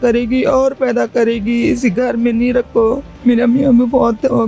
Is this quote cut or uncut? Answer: cut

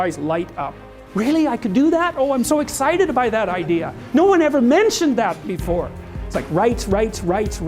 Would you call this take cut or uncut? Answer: cut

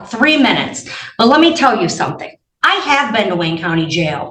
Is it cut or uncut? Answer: uncut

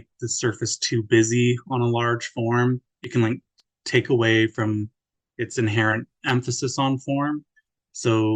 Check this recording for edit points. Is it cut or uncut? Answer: uncut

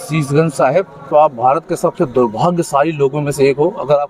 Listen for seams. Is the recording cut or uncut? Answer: cut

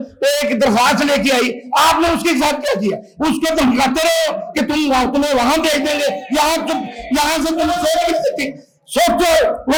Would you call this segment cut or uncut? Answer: uncut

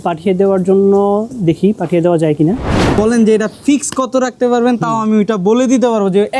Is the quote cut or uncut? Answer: cut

